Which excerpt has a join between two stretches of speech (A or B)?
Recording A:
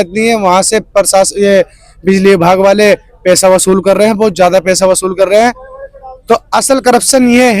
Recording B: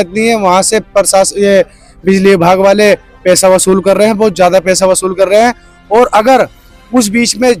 A